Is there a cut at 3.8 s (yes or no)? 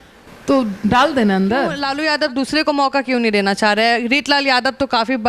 no